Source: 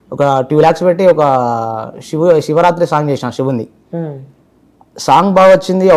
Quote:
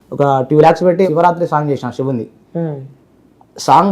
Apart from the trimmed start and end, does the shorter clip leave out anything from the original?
yes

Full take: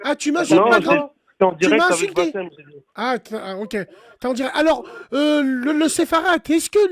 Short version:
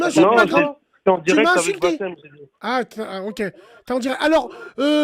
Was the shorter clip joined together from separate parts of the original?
no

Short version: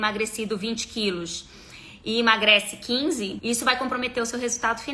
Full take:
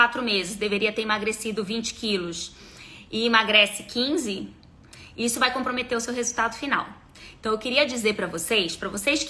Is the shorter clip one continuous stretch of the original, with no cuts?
no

